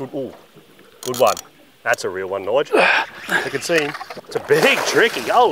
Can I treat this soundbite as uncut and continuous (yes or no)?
yes